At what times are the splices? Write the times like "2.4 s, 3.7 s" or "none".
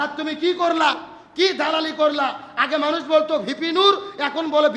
none

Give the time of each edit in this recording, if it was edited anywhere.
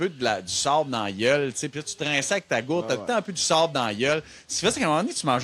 none

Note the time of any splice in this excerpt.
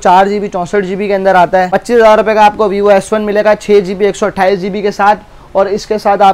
1.7 s

